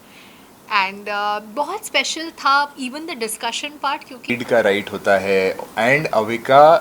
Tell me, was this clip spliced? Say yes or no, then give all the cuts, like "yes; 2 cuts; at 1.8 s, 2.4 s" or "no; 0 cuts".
yes; 1 cut; at 4.3 s